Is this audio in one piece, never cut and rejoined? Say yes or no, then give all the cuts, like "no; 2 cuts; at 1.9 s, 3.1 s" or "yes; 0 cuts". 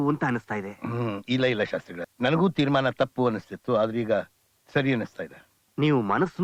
no; 1 cut; at 2.0 s